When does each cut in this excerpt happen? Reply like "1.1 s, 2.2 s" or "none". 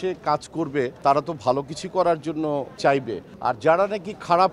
none